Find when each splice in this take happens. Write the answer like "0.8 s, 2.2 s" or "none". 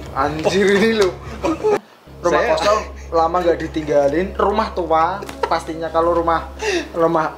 1.8 s